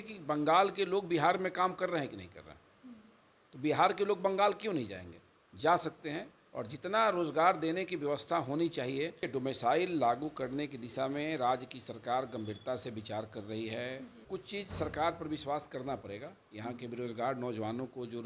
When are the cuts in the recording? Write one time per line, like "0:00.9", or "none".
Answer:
0:09.2
0:14.2